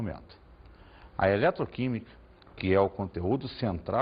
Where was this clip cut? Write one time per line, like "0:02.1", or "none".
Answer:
0:02.5